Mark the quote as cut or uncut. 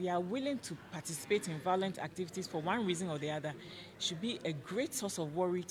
uncut